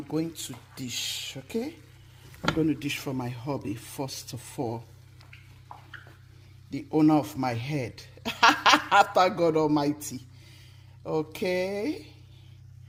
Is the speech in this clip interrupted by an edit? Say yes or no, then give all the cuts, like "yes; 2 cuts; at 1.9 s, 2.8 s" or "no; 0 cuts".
no; 0 cuts